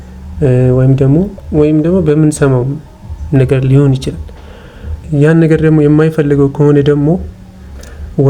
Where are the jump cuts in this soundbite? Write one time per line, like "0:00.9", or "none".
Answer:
0:01.4
0:05.0